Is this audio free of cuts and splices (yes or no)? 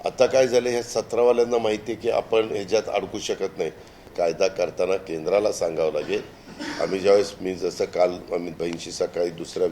no